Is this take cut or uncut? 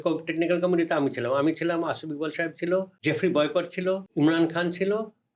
cut